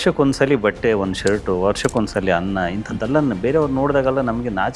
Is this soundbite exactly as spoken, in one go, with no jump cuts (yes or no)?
yes